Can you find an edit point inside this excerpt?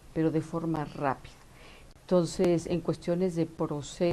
no; 0 cuts

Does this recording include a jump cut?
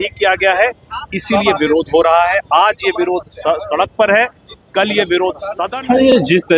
yes; 1 cut; at 5.5 s

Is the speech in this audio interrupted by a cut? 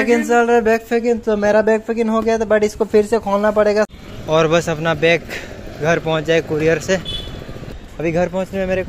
yes; 2 cuts; at 3.9 s, 7.6 s

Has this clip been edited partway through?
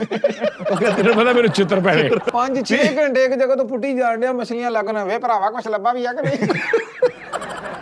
yes; 1 cut; at 2.2 s

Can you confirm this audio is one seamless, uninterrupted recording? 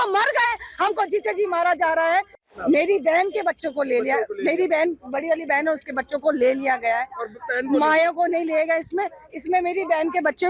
no; 1 cut; at 2.4 s

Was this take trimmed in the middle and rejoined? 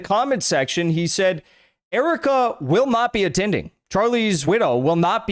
yes; 1 cut; at 4.4 s

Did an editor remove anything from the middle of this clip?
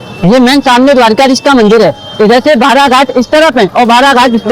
no; 0 cuts

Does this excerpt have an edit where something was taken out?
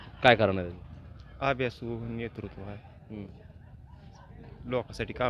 no; 0 cuts

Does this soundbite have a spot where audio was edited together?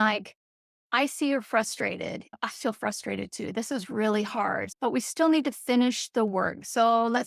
yes; 2 cuts; at 2.4 s, 4.7 s

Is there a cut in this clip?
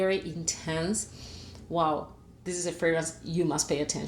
yes; 1 cut; at 2.4 s

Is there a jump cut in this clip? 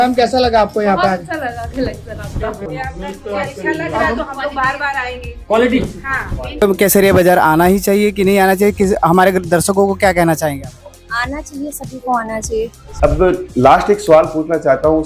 yes; 1 cut; at 12.9 s

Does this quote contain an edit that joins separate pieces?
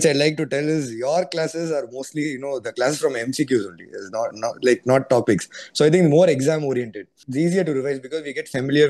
yes; 1 cut; at 7.2 s

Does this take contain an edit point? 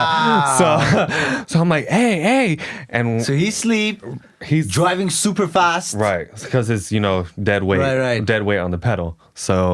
no; 0 cuts

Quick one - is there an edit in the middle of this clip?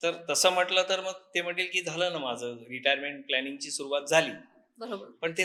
no; 0 cuts

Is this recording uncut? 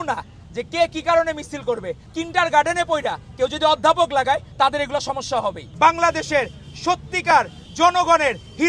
no; 2 cuts; at 2.0 s, 5.7 s

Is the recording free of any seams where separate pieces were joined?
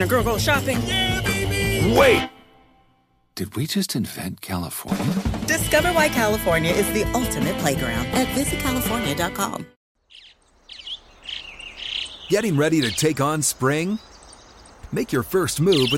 no; 1 cut; at 9.8 s

